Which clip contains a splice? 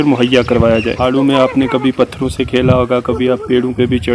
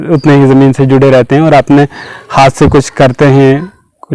first; 1 cut; at 1.0 s

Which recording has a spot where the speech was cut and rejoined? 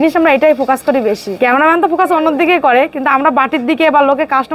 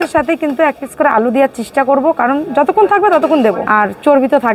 second; 1 cut; at 3.6 s

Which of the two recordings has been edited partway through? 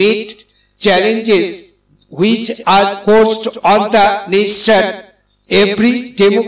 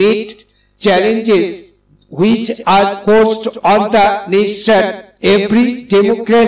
second; 1 cut; at 5.0 s

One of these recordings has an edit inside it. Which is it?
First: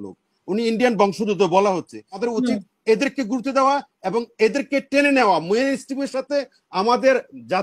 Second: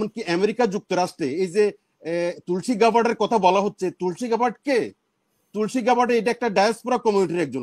first; 1 cut; at 2.2 s

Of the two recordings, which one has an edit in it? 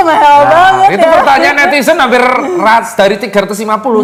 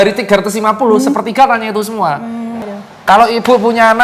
second; 1 cut; at 2.6 s

